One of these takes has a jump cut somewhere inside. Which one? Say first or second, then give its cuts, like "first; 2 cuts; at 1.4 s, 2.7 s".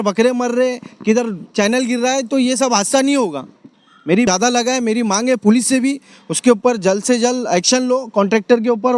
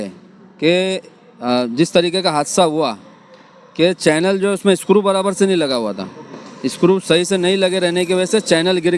first; 1 cut; at 4.3 s